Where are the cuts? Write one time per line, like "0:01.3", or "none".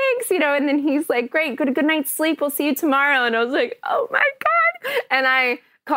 none